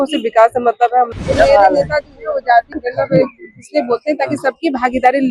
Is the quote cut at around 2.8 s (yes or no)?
yes